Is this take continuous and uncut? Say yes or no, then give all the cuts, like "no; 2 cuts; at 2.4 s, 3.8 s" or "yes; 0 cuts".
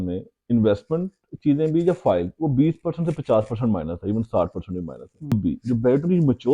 no; 1 cut; at 5.3 s